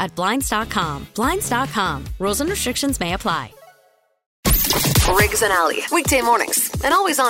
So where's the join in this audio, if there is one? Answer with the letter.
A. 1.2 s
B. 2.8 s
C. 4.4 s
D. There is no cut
C